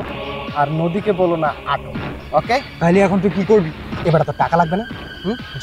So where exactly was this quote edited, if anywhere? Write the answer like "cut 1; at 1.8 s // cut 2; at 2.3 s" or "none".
none